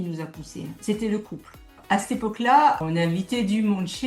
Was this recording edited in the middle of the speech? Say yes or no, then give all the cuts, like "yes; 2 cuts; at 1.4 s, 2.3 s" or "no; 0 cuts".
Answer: yes; 2 cuts; at 1.8 s, 2.9 s